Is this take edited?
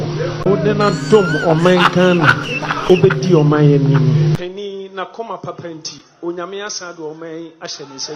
no; 0 cuts

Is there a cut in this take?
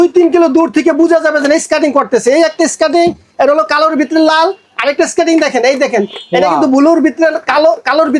no; 0 cuts

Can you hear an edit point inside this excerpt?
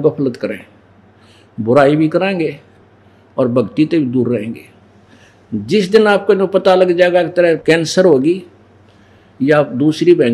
no; 0 cuts

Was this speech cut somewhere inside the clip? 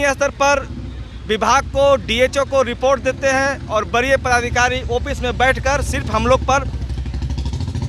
no; 0 cuts

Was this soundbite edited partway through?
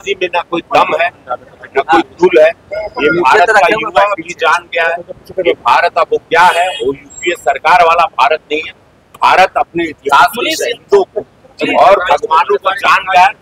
no; 0 cuts

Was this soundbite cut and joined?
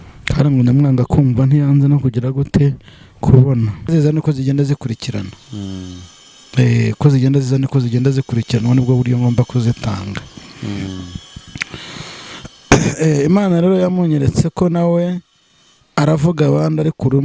yes; 1 cut; at 3.9 s

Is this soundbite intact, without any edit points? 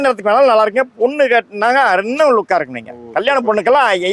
yes; 0 cuts

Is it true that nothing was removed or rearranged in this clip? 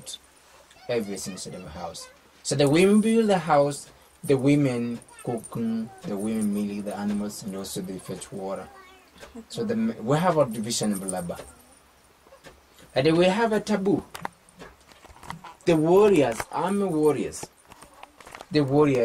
no; 1 cut; at 5.8 s

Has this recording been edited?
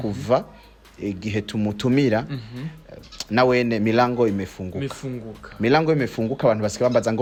no; 0 cuts

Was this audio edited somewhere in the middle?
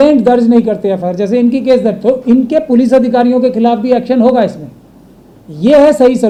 no; 0 cuts

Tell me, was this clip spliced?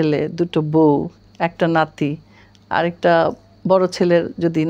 no; 0 cuts

